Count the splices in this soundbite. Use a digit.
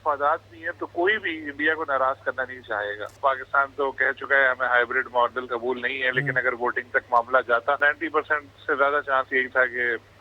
3